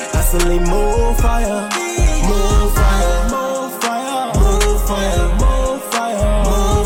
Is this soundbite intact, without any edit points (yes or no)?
yes